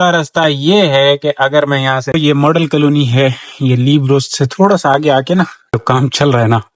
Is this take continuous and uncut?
no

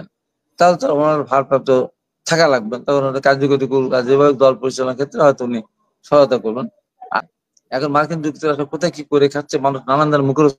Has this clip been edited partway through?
yes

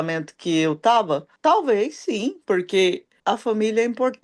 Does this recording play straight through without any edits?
no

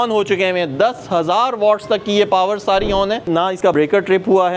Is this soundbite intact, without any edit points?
no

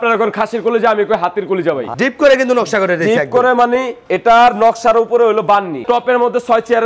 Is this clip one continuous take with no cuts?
no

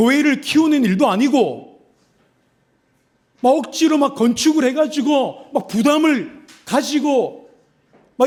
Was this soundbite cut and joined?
no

